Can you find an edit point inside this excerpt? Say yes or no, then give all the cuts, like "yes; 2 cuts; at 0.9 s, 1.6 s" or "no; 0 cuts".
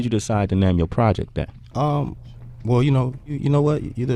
no; 0 cuts